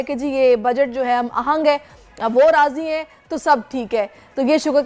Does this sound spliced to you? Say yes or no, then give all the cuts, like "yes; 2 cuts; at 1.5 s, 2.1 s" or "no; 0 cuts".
no; 0 cuts